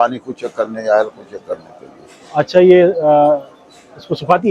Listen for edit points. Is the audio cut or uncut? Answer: uncut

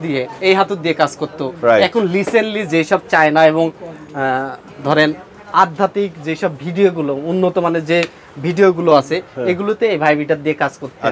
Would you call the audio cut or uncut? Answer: uncut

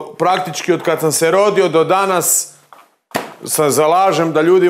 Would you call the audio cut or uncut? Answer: uncut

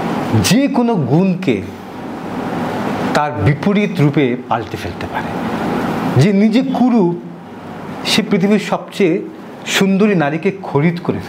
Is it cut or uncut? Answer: uncut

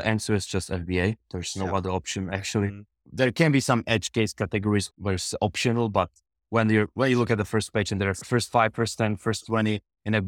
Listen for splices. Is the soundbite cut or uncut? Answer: cut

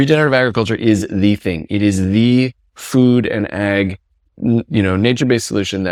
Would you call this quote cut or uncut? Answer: uncut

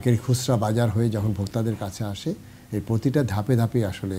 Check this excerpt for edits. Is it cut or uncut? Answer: uncut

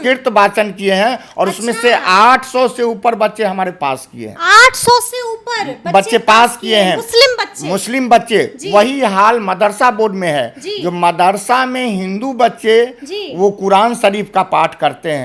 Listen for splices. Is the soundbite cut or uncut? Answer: uncut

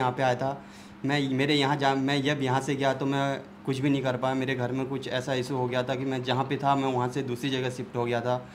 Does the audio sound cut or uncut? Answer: uncut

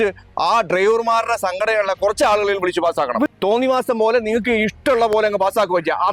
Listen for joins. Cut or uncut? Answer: cut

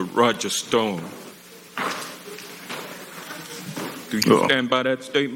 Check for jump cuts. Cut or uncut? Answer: uncut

